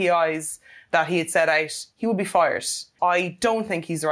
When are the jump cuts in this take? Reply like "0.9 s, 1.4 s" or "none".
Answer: 2.9 s